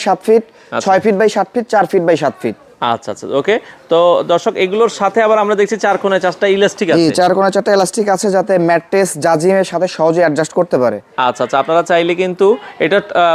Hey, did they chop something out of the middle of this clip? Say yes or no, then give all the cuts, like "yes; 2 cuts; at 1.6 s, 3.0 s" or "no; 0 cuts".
no; 0 cuts